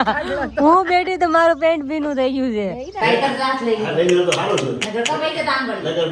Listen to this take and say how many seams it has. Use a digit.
1